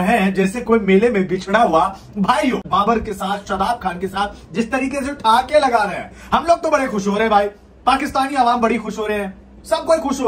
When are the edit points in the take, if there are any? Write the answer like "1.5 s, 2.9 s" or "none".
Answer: 2.7 s